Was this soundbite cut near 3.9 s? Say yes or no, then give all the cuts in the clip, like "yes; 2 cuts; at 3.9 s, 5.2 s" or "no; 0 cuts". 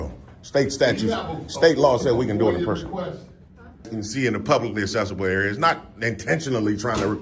yes; 1 cut; at 3.9 s